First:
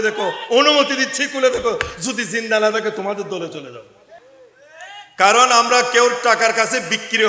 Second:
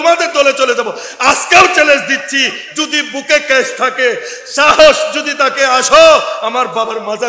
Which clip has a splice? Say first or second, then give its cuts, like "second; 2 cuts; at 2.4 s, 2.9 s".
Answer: first; 1 cut; at 4.2 s